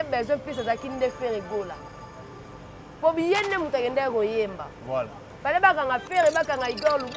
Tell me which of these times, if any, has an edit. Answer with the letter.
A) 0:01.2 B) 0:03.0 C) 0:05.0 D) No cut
D